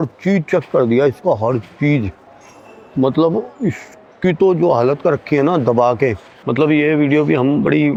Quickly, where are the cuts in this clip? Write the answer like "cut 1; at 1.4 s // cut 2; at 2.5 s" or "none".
none